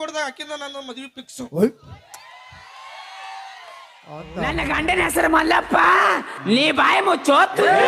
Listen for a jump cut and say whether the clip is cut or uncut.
cut